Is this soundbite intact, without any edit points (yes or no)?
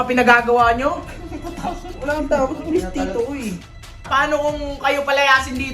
no